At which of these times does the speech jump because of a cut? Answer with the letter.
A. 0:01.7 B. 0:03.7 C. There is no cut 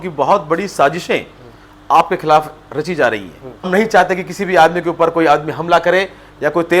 B